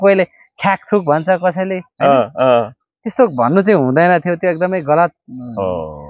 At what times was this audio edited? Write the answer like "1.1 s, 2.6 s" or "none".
none